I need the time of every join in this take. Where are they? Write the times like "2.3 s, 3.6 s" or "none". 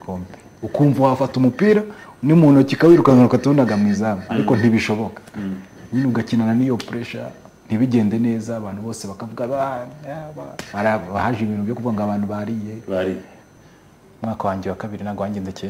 13.5 s